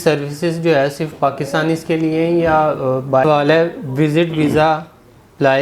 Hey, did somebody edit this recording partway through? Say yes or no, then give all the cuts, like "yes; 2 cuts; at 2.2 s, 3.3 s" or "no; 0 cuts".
yes; 1 cut; at 3.2 s